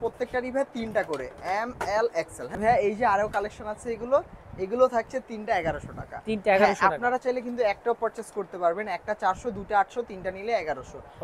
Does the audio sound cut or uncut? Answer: uncut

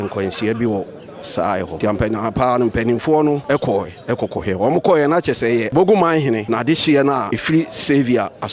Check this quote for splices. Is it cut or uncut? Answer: cut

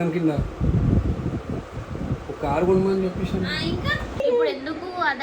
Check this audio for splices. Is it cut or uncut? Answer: cut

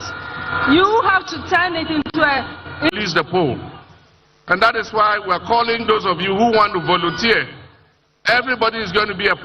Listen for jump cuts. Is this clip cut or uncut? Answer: cut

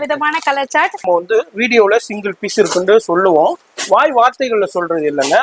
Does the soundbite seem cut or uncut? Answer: cut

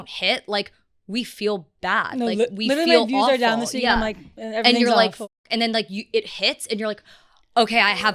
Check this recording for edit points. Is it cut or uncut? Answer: uncut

